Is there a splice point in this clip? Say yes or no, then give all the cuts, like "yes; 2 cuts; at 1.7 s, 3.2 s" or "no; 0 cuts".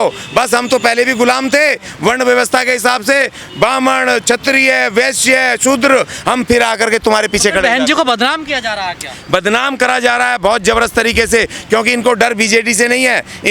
no; 0 cuts